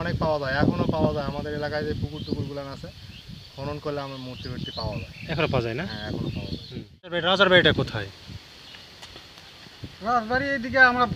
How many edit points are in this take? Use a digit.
1